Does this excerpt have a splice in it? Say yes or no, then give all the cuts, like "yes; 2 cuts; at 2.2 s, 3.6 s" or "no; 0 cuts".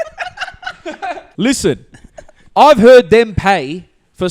yes; 1 cut; at 1.3 s